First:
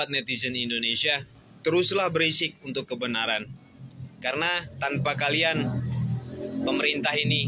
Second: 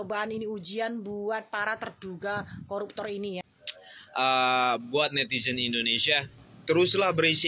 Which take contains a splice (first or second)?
second